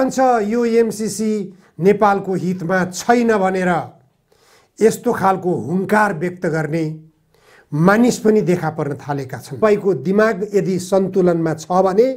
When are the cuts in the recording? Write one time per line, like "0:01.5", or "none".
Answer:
0:09.6